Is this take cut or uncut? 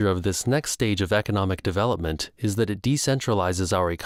uncut